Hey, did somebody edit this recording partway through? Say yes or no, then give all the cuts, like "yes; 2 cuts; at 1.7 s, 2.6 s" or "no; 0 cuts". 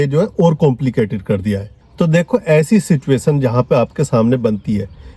yes; 1 cut; at 1.8 s